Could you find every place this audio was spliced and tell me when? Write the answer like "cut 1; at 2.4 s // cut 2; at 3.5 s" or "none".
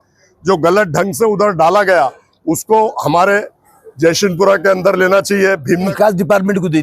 cut 1; at 5.9 s